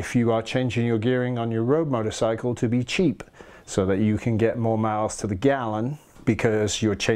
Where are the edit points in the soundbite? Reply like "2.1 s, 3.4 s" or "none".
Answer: 6.1 s